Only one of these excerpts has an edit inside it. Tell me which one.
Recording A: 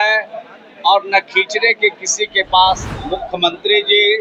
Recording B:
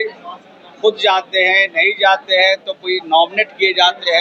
A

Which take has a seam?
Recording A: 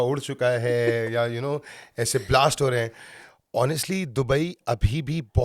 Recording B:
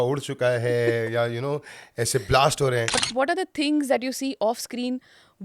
B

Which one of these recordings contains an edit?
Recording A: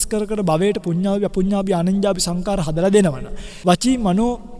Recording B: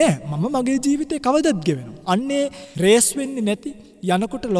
B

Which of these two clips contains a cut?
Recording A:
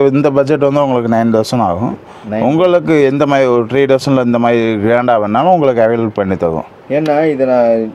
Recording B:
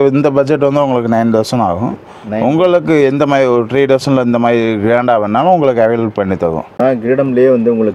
B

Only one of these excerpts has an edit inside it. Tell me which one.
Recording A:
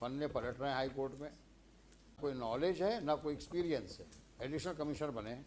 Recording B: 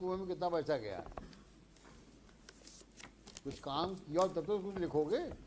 A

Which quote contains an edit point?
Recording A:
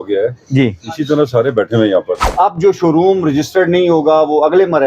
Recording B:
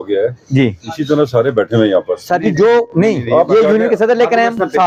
A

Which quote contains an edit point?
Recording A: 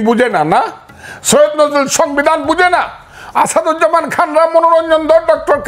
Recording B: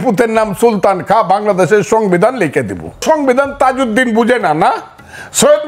B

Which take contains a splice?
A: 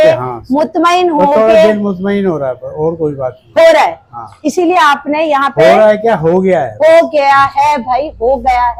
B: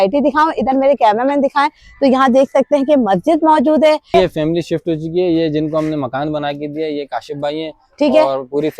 B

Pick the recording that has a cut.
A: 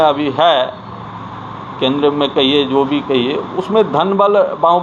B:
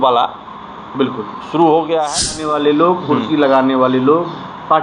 B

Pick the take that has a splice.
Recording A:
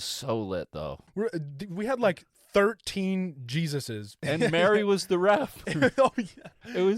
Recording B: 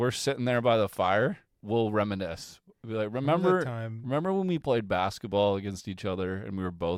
A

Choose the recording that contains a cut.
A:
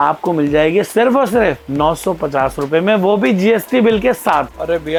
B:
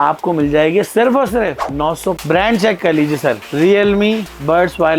B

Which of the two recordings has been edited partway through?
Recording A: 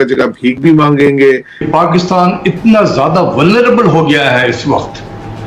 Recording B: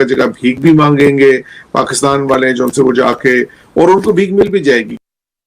A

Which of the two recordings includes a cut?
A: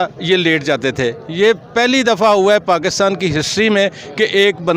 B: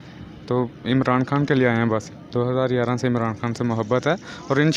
B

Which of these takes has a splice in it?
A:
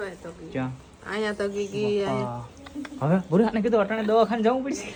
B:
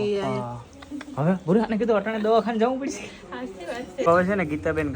B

